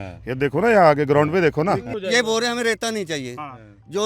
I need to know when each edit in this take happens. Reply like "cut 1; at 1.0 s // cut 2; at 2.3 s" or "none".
cut 1; at 1.9 s